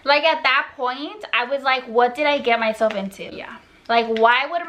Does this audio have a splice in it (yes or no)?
no